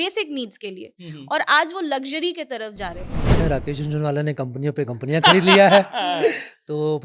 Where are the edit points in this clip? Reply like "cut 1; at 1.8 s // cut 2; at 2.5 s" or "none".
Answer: cut 1; at 3.4 s